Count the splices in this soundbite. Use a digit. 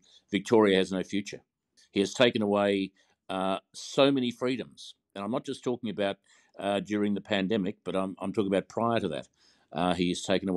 1